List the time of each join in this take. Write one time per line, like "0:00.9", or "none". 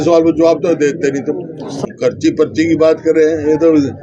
0:01.7